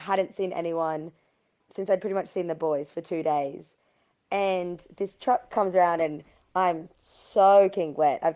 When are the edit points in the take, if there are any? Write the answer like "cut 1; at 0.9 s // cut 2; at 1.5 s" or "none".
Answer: none